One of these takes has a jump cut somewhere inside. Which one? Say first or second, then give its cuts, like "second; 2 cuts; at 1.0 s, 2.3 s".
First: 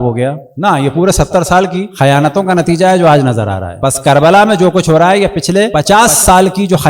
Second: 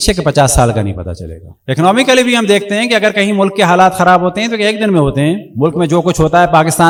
first; 1 cut; at 5.8 s